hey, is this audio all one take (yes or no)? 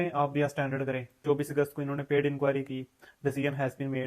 no